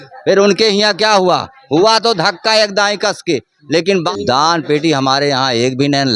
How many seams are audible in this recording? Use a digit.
1